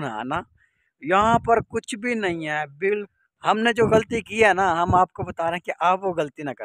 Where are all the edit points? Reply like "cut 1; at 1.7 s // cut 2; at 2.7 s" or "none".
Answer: cut 1; at 3.1 s